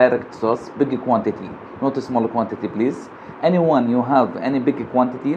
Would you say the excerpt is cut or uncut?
uncut